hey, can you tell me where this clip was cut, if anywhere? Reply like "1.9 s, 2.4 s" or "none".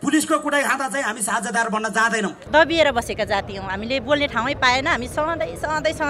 2.4 s